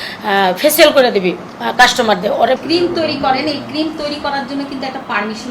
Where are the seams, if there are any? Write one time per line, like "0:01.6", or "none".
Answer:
0:02.6